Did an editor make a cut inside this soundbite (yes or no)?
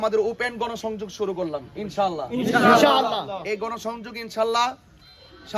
no